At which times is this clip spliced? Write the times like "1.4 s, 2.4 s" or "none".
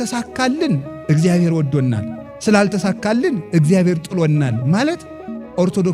none